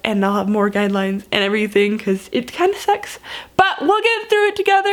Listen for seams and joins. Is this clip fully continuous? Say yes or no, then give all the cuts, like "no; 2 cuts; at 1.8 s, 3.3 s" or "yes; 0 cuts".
yes; 0 cuts